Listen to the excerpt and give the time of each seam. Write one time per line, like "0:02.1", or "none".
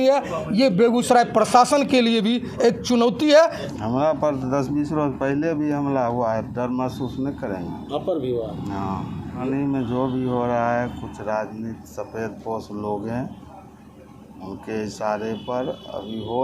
0:03.6
0:09.4